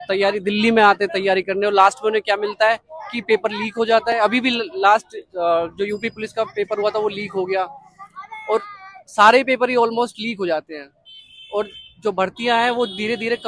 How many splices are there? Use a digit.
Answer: 0